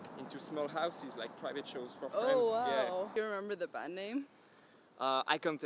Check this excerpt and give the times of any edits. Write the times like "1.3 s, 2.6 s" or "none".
3.1 s

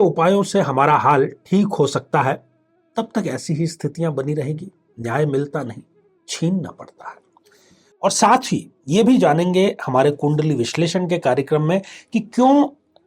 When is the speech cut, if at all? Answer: 7.8 s

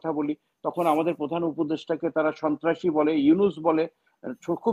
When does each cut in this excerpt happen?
none

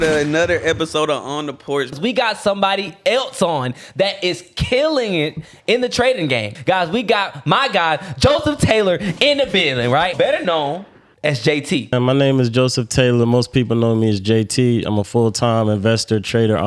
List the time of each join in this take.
2.0 s, 6.5 s, 10.1 s, 11.9 s

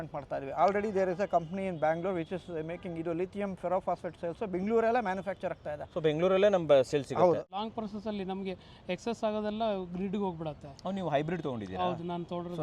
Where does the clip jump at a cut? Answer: 7.5 s

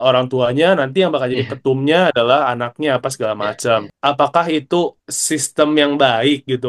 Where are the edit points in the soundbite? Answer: 3.9 s, 5.1 s

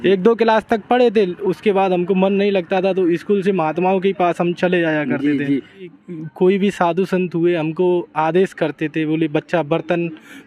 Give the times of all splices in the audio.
5.9 s

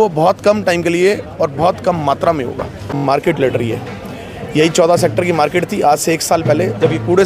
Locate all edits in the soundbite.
3.0 s

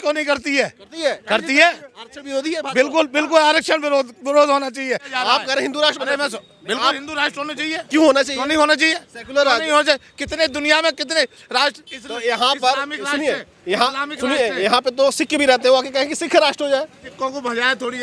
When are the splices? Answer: 5.1 s, 17.0 s

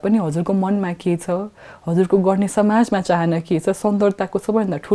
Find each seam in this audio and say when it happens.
none

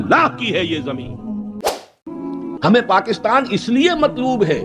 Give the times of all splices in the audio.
1.8 s

